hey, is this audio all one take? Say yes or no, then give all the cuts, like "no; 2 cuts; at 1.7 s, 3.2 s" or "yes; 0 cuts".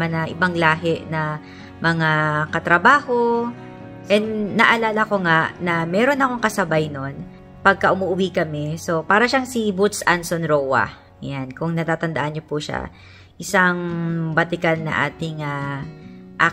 yes; 0 cuts